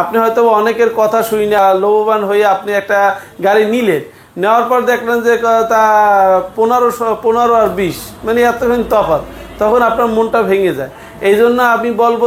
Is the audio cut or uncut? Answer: cut